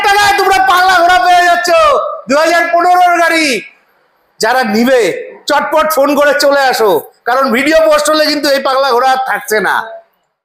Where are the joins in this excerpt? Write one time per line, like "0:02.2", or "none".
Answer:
none